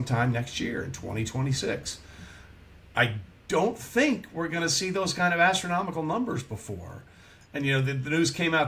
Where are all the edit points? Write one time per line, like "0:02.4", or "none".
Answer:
none